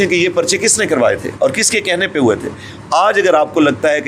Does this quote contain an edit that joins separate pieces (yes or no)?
no